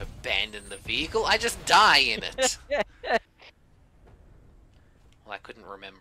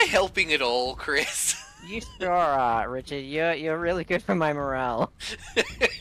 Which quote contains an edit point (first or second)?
first